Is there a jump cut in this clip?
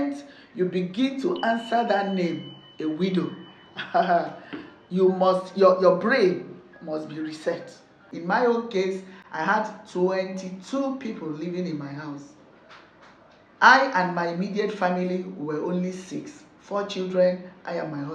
yes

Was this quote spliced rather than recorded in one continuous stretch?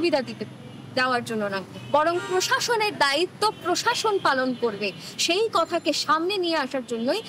no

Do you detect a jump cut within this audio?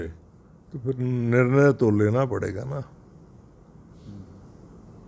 no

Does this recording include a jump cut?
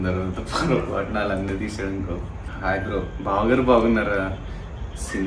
yes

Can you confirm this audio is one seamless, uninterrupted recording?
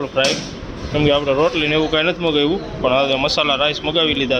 yes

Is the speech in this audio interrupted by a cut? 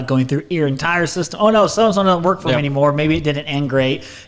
no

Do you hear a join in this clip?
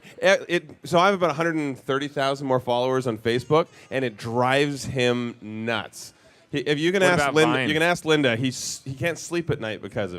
yes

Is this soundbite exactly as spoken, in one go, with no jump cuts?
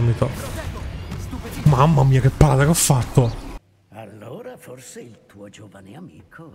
no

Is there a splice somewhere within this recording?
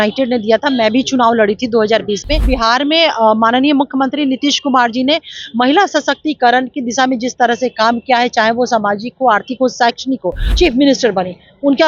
yes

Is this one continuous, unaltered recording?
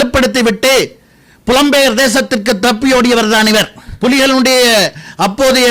no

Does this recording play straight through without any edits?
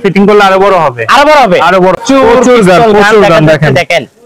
no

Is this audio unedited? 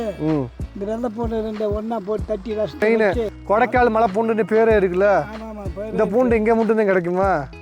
no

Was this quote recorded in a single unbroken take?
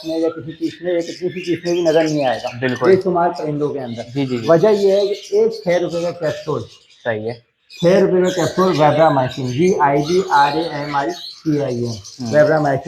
yes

